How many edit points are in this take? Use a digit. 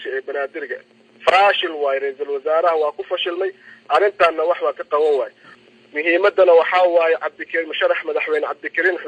1